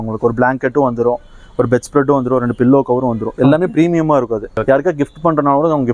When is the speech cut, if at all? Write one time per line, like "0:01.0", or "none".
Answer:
0:04.6

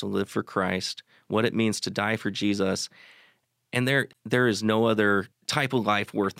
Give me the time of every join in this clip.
0:04.1
0:05.4

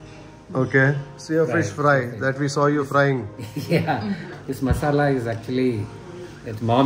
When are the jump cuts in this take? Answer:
0:01.1
0:04.3

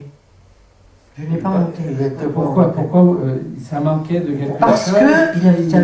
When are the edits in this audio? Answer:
0:03.5

